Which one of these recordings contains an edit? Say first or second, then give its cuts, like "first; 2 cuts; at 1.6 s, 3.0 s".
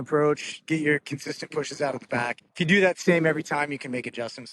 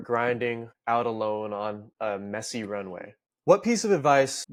first; 1 cut; at 2.4 s